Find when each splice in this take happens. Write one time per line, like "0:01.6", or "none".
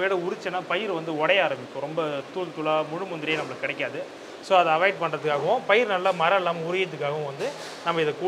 none